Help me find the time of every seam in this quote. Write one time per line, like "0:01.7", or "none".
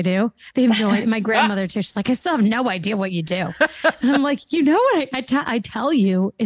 none